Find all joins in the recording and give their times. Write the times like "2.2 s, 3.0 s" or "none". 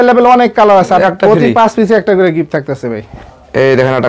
1.0 s